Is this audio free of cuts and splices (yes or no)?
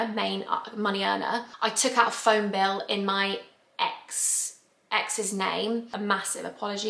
no